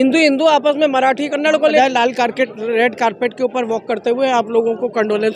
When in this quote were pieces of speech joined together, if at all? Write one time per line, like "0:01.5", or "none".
0:01.8